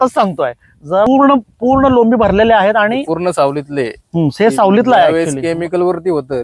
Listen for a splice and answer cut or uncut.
cut